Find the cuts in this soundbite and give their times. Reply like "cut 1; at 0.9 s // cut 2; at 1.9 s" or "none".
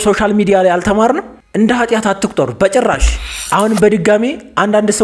cut 1; at 1.3 s // cut 2; at 3.3 s